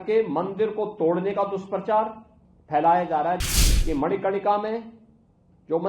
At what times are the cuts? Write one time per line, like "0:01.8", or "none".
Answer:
0:03.5